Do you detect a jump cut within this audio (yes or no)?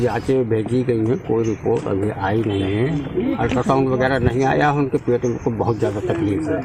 no